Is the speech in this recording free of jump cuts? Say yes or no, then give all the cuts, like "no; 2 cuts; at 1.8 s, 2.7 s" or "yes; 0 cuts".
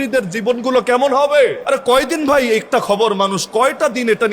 no; 1 cut; at 1.6 s